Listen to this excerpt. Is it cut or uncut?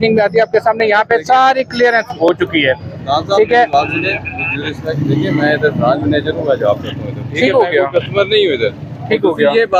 uncut